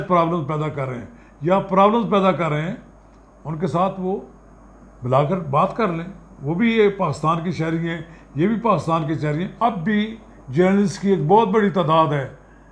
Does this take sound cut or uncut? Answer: cut